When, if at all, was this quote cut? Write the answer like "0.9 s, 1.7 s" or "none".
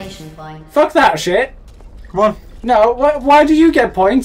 none